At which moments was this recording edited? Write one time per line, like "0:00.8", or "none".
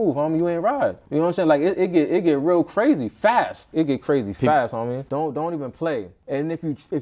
0:03.7
0:05.0
0:06.2